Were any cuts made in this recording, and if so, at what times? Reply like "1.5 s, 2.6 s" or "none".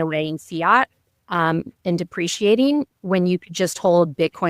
none